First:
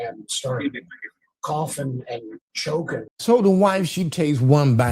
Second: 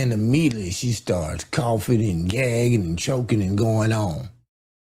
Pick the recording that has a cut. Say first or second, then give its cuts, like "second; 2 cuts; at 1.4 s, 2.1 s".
first; 1 cut; at 3.1 s